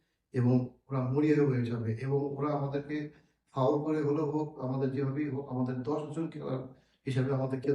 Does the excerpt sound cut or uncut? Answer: uncut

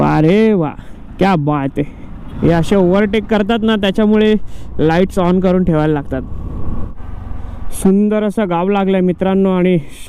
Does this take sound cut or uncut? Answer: cut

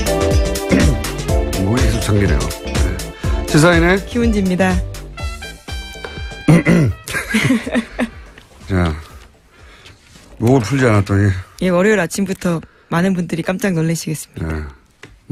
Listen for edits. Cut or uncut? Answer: uncut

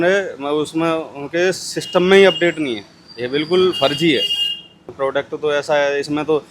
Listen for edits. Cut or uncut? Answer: cut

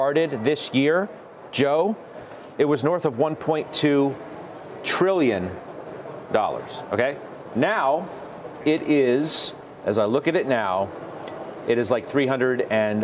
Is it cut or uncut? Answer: uncut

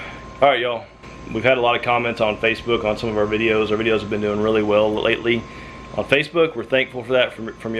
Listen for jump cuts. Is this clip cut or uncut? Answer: cut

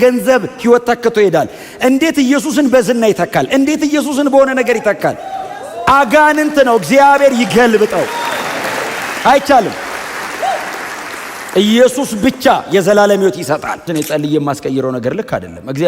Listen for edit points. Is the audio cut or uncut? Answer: cut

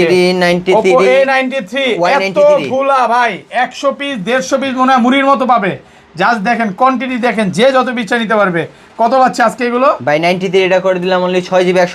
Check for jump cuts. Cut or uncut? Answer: uncut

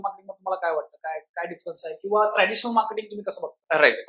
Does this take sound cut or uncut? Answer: uncut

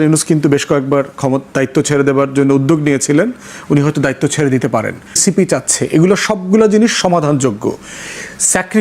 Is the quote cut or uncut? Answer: cut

